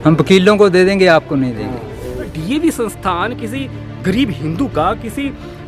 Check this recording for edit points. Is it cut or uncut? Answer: cut